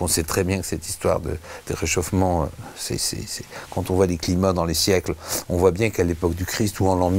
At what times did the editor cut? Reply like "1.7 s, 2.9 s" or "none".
none